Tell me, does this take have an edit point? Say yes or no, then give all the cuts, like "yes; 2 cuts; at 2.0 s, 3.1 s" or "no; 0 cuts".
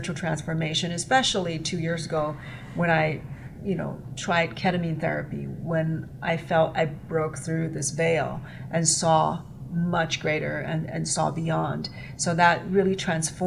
no; 0 cuts